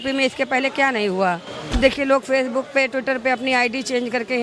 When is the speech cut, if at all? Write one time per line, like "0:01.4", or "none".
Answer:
0:01.8